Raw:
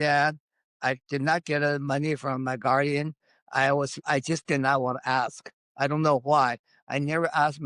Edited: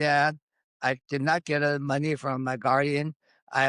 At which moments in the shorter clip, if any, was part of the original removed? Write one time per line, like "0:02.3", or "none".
none